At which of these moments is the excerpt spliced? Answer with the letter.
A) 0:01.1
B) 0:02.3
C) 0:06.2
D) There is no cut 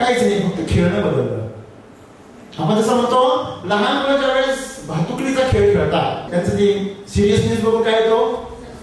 C